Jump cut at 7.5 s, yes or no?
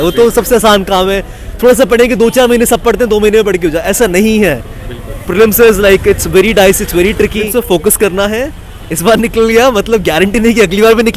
yes